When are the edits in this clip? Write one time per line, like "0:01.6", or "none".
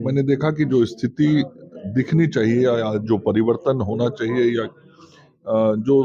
none